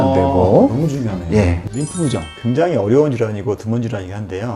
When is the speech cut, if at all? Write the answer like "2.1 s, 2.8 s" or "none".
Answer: 1.6 s